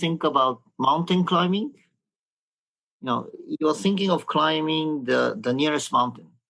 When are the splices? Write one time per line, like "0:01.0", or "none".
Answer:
none